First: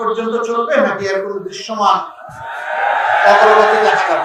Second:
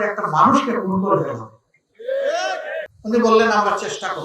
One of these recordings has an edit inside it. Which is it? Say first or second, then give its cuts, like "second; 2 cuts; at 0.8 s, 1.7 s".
second; 1 cut; at 2.8 s